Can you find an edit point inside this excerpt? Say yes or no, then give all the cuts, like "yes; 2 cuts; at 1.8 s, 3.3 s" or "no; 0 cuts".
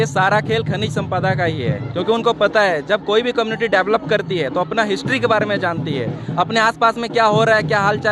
no; 0 cuts